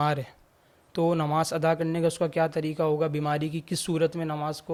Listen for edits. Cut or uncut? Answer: uncut